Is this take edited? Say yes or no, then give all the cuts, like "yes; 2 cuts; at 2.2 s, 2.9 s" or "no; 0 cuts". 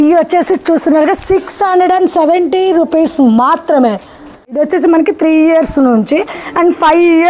yes; 1 cut; at 4.6 s